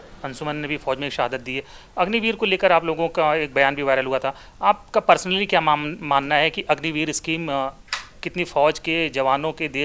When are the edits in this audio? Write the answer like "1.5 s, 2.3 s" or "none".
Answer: none